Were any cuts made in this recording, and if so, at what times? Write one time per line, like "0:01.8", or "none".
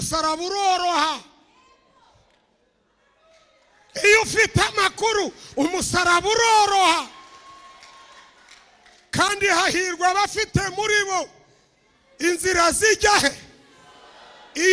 none

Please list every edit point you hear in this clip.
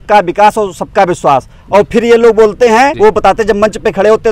0:02.9

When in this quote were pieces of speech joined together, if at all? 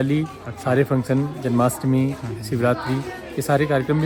none

